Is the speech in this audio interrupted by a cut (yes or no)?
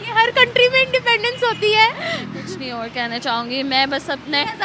yes